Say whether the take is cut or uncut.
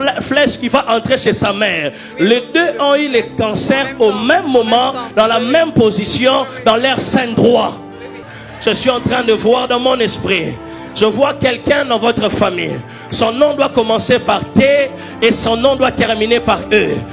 cut